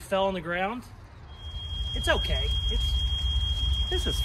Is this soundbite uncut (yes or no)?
yes